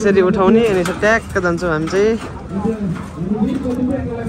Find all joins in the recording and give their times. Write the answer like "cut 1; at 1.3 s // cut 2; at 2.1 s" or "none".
none

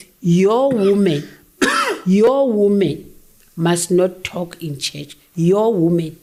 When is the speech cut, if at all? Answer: none

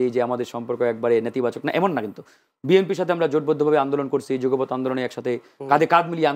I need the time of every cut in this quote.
none

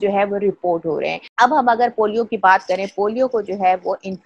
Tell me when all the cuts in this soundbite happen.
cut 1; at 1.2 s

